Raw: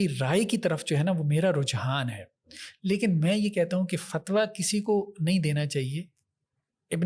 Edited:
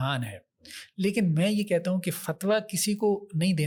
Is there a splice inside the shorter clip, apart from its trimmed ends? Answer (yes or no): no